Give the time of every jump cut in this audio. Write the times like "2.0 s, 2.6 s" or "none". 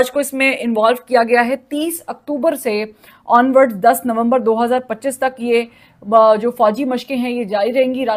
none